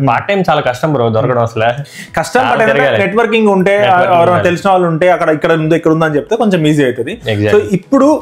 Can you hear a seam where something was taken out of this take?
no; 0 cuts

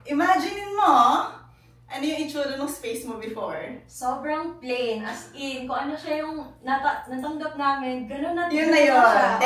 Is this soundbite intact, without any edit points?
yes; 0 cuts

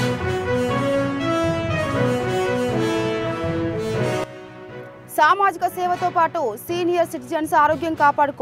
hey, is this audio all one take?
no; 1 cut; at 4.2 s

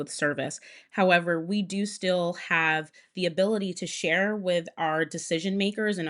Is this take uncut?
yes; 0 cuts

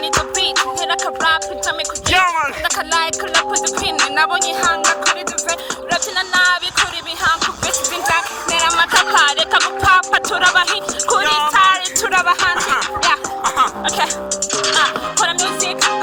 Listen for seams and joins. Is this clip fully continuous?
yes; 0 cuts

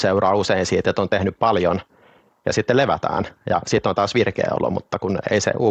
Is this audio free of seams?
yes; 0 cuts

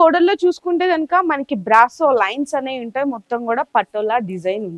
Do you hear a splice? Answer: no; 0 cuts

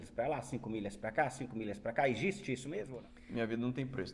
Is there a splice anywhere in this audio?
yes; 1 cut; at 2.9 s

